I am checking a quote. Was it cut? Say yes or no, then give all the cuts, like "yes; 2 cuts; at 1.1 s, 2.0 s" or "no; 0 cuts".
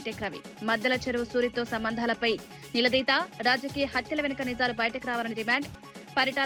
no; 0 cuts